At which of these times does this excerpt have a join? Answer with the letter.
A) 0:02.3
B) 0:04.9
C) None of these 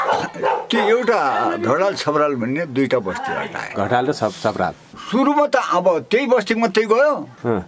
B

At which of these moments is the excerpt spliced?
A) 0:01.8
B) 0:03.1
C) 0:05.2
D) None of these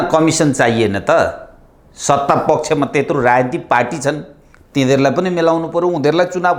D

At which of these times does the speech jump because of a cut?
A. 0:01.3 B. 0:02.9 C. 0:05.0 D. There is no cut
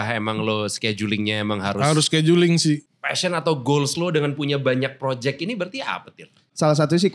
B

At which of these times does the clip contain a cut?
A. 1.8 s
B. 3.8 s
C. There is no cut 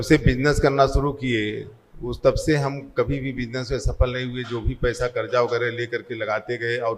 C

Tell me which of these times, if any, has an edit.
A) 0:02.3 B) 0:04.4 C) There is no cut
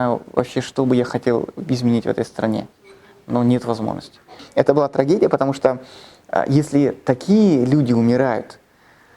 B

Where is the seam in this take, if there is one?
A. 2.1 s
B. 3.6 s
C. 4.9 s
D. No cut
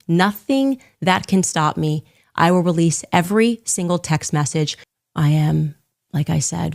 C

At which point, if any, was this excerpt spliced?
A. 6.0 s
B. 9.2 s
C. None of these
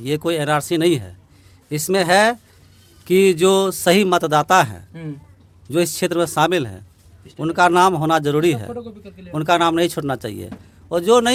C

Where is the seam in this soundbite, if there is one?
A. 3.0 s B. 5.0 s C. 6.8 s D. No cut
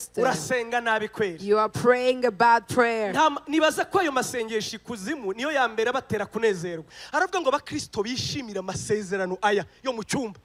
C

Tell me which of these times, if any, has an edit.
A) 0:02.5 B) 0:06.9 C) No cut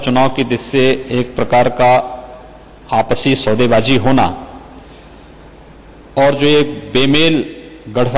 C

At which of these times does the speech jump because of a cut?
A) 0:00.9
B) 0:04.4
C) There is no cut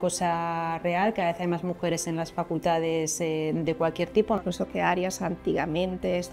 B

